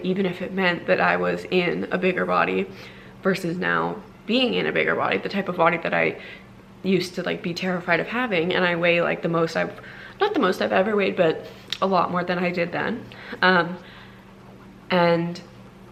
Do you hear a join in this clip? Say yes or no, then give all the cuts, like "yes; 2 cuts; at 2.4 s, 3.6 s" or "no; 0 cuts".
no; 0 cuts